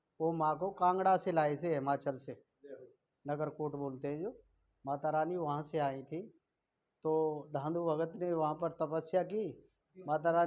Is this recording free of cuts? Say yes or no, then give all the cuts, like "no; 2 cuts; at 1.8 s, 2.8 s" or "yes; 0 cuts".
yes; 0 cuts